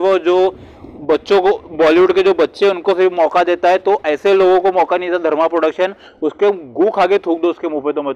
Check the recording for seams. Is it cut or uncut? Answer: uncut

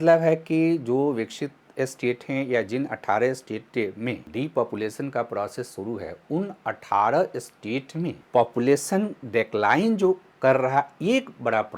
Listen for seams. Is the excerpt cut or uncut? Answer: cut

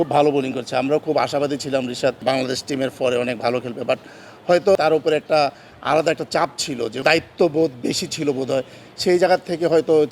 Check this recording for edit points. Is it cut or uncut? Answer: cut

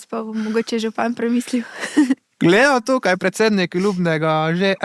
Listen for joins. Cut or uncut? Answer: uncut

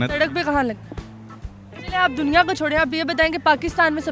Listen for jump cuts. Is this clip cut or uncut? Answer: uncut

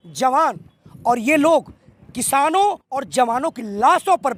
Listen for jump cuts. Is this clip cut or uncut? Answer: uncut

